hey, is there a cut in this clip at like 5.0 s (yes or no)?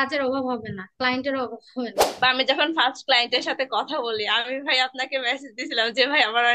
no